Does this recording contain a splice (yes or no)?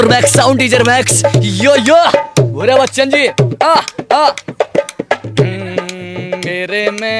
no